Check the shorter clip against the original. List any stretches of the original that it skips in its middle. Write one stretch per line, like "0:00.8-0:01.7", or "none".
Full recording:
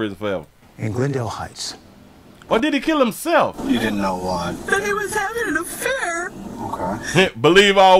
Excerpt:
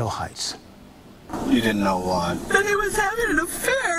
0:02.5-0:03.5